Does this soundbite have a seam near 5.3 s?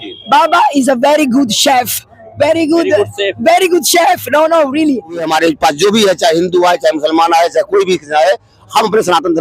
yes; 1 cut; at 5.3 s

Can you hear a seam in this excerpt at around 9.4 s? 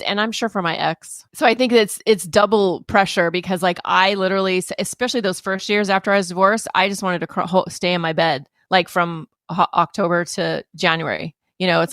no; 1 cut; at 1.3 s

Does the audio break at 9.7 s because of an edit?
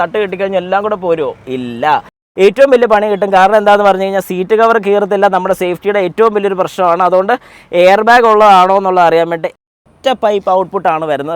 yes; 2 cuts; at 2.2 s, 9.7 s

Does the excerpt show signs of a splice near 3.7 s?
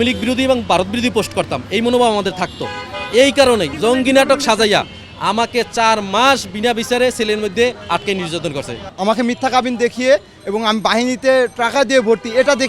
yes; 2 cuts; at 3.7 s, 8.8 s

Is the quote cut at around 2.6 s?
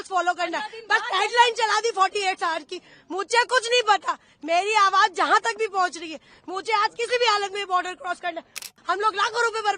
no; 1 cut; at 8.7 s

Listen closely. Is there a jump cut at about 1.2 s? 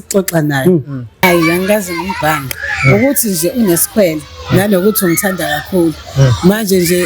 yes; 1 cut; at 1.2 s

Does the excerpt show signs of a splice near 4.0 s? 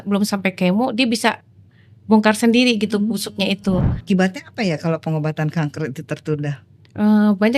yes; 1 cut; at 4.0 s

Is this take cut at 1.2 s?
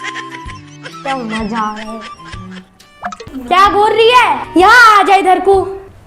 no; 1 cut; at 3.3 s

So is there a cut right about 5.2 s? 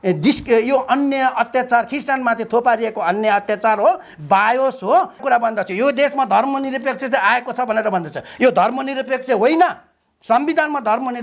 yes; 1 cut; at 5.2 s

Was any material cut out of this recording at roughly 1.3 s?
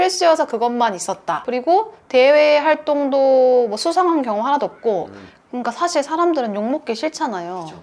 yes; 2 cuts; at 1.3 s, 5.2 s

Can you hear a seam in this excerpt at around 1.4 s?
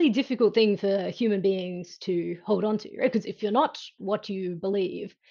no; 1 cut; at 3.4 s

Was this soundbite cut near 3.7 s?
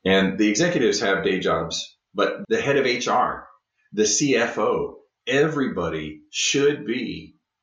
no; 1 cut; at 2.0 s

